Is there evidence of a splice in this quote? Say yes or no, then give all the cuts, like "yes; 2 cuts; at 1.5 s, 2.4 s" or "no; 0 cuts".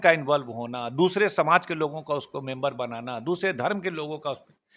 no; 0 cuts